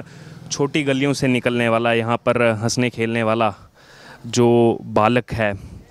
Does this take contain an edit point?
no; 0 cuts

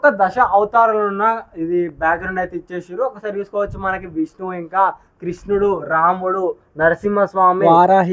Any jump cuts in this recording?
no; 0 cuts

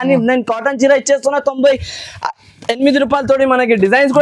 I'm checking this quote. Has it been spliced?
no; 0 cuts

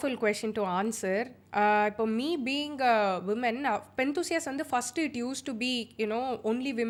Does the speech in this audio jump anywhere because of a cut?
no; 0 cuts

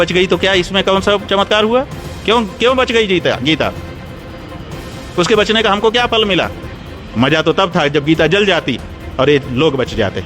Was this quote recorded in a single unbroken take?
no; 1 cut; at 6.6 s

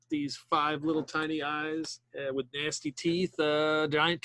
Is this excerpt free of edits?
no; 1 cut; at 2.0 s

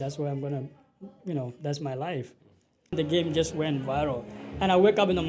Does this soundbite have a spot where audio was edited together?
yes; 1 cut; at 2.9 s

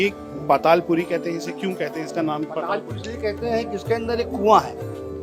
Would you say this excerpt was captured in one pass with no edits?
yes; 0 cuts

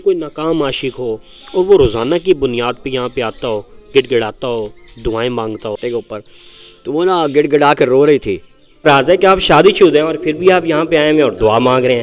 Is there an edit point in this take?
yes; 2 cuts; at 5.8 s, 8.8 s

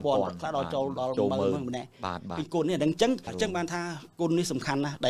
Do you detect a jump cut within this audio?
yes; 1 cut; at 3.3 s

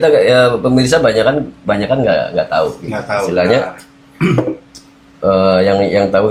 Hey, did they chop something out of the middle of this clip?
no; 0 cuts

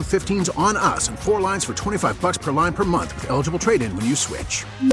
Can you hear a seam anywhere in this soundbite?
no; 0 cuts

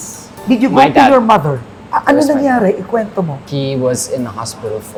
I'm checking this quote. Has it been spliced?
no; 0 cuts

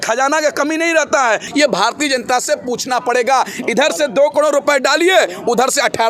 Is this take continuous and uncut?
no; 1 cut; at 1.5 s

